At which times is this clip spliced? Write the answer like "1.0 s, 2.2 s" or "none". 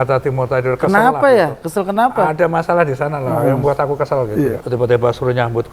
4.6 s